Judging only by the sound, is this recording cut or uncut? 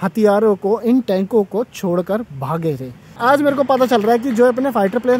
cut